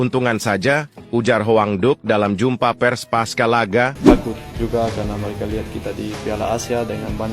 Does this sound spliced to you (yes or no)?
yes